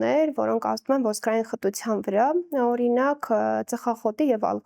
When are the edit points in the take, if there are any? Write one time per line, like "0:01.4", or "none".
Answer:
none